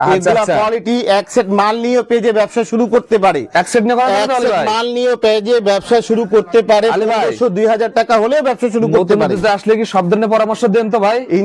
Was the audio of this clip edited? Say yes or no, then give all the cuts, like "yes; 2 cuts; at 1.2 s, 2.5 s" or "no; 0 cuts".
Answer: no; 0 cuts